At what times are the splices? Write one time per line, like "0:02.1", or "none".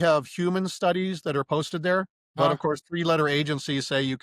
0:02.4